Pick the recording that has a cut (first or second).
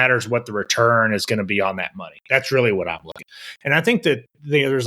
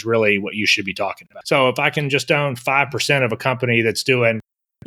first